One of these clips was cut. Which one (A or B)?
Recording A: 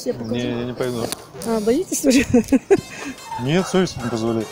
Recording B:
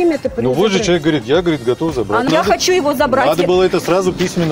B